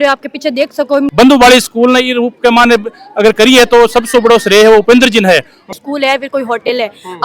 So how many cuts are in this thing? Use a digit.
2